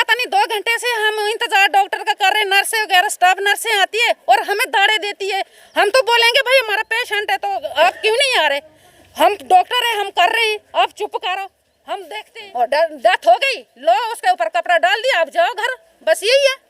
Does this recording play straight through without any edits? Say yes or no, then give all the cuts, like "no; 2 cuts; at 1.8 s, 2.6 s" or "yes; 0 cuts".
no; 1 cut; at 12.2 s